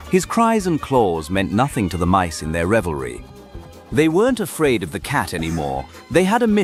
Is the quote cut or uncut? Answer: uncut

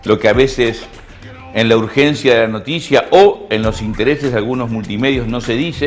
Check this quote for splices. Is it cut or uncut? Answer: uncut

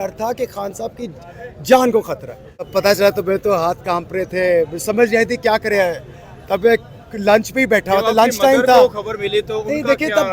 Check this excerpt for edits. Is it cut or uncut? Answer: cut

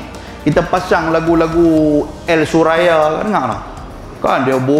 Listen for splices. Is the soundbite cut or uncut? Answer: uncut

